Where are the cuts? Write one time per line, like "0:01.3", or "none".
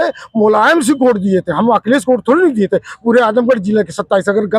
none